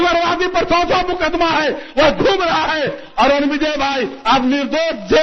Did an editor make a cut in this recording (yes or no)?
no